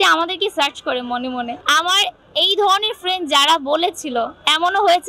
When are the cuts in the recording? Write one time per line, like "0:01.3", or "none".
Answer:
0:01.6